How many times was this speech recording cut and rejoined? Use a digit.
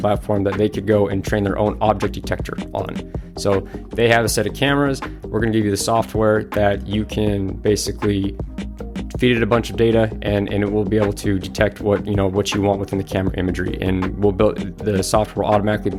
0